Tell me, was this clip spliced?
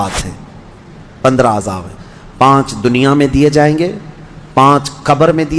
no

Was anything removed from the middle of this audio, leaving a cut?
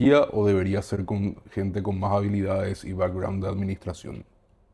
no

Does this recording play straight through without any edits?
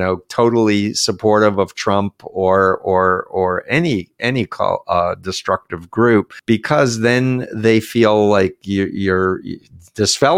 no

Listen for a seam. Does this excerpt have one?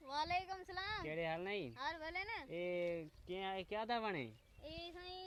no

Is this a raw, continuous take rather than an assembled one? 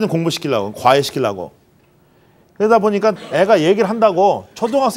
no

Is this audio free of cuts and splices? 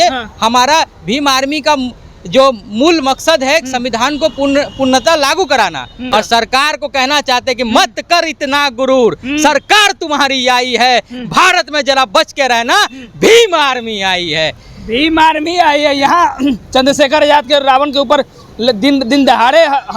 no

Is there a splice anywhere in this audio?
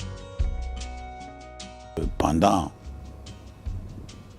yes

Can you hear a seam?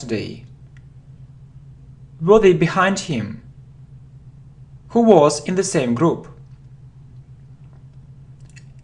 no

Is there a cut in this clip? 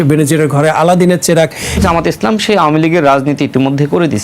yes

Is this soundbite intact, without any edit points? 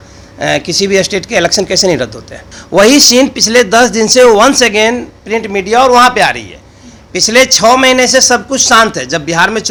yes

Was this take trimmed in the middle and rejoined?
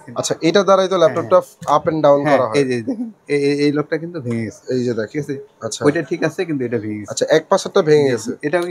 no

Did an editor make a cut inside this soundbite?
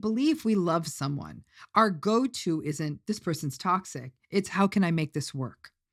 no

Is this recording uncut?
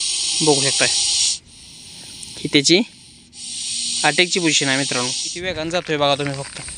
no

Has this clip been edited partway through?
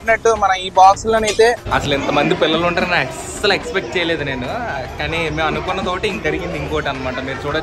yes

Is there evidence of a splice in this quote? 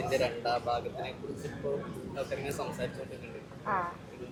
no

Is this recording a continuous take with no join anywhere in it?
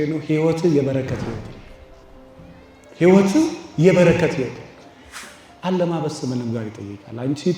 no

